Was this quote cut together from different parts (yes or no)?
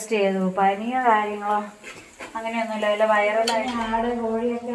yes